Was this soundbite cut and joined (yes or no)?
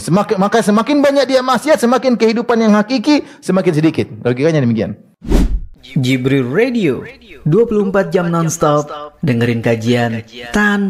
yes